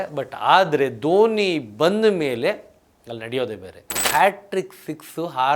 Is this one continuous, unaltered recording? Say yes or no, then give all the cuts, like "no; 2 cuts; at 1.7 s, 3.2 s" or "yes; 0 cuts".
no; 1 cut; at 3.9 s